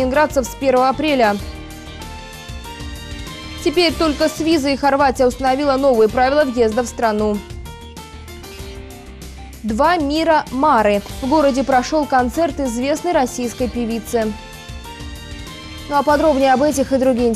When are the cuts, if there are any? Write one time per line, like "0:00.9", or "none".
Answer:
none